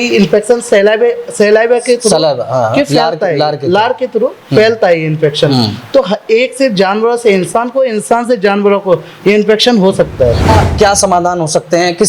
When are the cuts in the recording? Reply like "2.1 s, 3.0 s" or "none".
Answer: 10.5 s